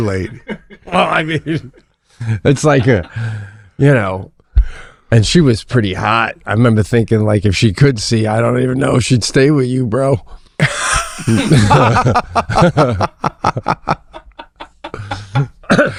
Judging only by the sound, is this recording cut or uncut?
uncut